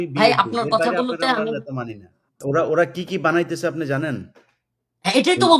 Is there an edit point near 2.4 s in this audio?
yes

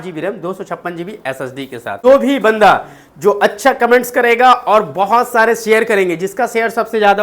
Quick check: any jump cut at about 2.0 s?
yes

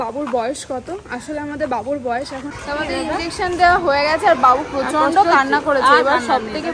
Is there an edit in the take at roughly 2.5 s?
yes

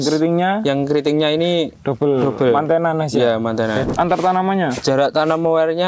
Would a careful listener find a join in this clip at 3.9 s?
yes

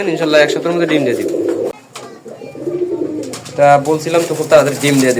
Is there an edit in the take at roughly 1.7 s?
yes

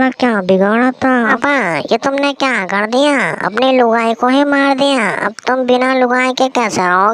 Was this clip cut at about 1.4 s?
yes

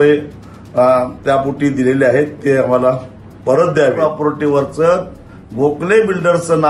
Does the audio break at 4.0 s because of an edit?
yes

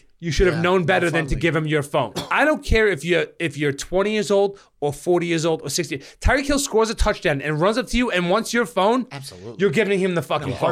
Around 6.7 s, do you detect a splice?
no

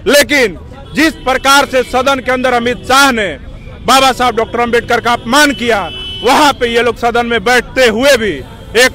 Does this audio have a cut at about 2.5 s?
no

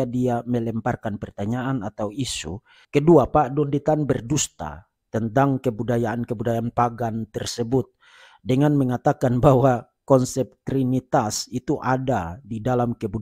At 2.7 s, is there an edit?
yes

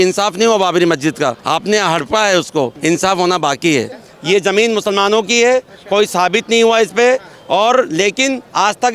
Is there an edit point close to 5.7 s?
no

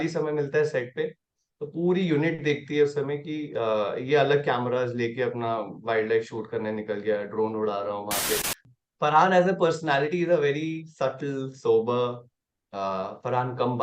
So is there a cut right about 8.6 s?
yes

